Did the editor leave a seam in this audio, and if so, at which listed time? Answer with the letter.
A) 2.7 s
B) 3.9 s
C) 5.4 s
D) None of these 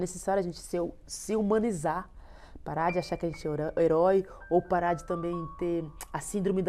D